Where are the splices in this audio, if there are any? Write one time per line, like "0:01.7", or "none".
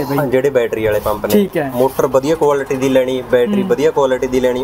none